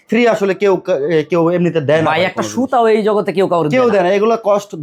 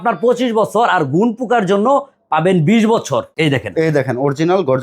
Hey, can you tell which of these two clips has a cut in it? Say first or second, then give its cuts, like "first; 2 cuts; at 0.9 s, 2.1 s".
second; 1 cut; at 3.3 s